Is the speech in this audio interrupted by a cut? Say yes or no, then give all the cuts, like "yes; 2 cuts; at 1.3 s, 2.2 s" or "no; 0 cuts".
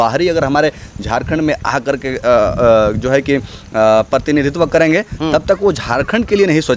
no; 0 cuts